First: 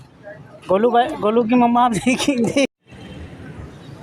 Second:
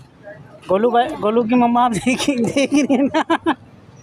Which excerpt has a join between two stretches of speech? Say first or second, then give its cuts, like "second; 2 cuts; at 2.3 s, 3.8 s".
first; 1 cut; at 2.7 s